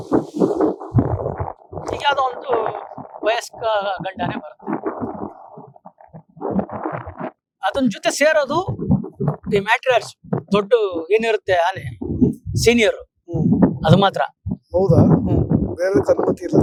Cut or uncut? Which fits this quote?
uncut